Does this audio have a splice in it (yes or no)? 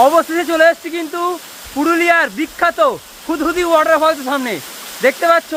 no